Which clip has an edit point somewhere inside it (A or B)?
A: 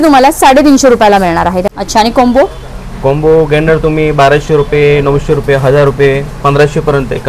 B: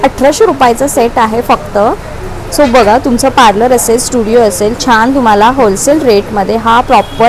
A